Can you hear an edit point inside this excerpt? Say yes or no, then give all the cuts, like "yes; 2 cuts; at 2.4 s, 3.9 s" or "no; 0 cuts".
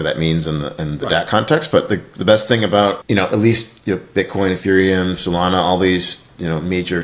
yes; 1 cut; at 3.0 s